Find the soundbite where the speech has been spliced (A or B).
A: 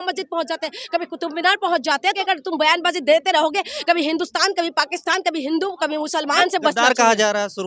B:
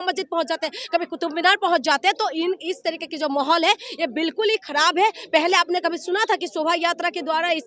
A